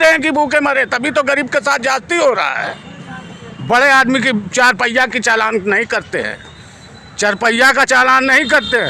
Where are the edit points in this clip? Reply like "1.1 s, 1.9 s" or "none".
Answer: none